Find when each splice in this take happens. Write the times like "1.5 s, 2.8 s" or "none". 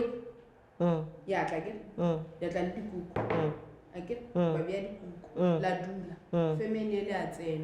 none